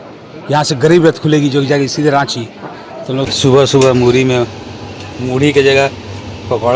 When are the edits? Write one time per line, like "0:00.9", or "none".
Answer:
0:03.3